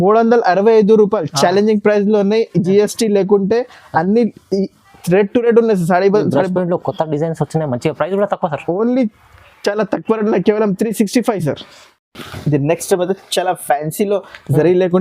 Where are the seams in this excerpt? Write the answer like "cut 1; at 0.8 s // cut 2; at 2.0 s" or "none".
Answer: none